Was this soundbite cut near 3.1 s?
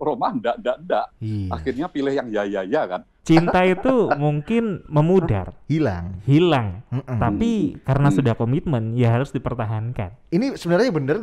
yes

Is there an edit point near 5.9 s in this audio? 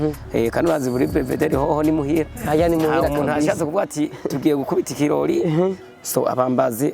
yes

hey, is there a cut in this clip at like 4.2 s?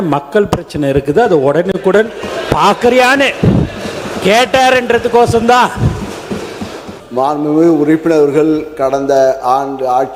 no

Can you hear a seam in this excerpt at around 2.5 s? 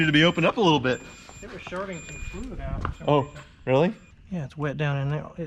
no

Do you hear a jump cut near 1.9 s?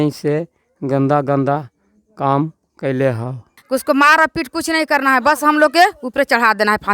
no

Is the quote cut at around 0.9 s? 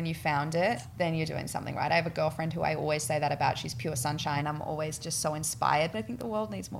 yes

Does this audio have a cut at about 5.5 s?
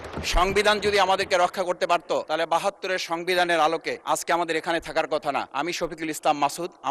yes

